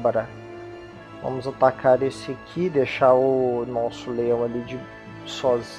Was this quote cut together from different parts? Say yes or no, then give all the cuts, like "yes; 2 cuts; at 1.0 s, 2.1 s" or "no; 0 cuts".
yes; 1 cut; at 2.1 s